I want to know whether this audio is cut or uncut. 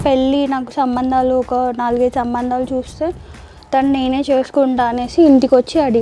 uncut